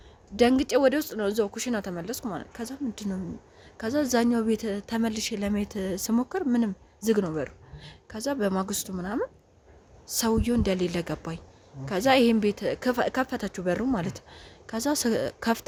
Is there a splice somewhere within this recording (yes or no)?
no